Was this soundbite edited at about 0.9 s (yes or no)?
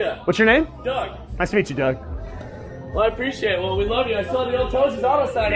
no